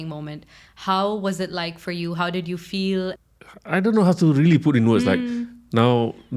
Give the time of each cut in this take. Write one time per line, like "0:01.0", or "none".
0:03.2